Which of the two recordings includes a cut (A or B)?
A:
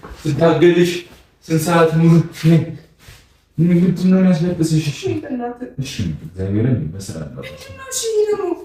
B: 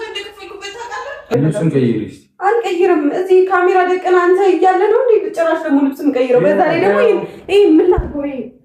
B